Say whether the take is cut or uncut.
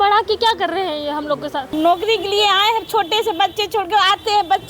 cut